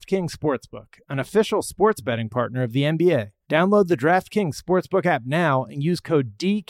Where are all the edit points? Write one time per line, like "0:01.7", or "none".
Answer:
0:03.4